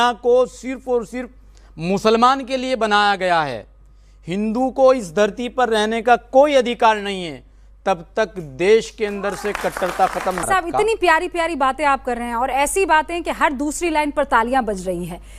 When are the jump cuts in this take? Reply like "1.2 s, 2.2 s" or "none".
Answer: 10.4 s